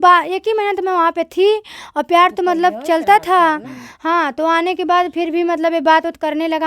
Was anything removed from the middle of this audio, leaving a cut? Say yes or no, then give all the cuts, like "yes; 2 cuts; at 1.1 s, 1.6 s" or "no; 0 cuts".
no; 0 cuts